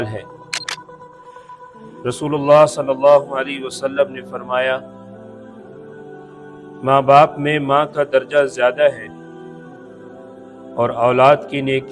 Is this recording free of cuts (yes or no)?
no